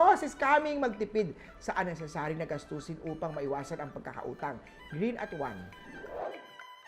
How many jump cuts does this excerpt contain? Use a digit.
1